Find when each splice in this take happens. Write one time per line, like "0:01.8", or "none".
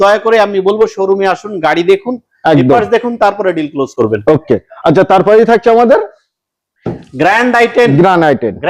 none